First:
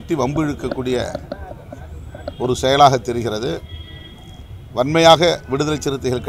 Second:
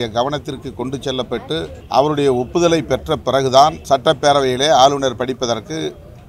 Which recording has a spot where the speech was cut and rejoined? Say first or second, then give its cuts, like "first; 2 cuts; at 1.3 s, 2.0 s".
second; 2 cuts; at 1.8 s, 3.8 s